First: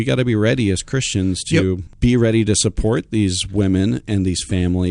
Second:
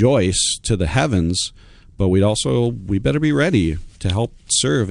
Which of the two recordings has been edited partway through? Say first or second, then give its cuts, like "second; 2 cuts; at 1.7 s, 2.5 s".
first; 1 cut; at 1.9 s